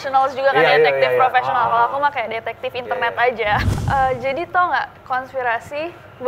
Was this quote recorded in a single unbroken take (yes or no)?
no